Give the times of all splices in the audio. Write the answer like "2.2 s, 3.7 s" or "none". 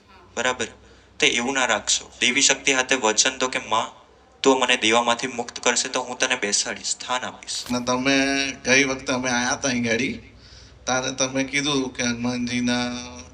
7.7 s